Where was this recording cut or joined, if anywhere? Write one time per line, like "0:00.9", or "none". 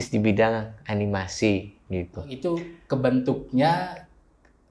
0:02.2